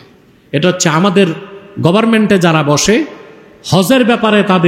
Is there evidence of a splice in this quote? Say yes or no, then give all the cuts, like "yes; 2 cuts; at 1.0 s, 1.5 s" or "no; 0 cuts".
no; 0 cuts